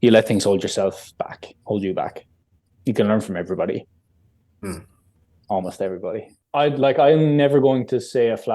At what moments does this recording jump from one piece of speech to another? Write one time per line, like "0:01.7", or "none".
0:06.4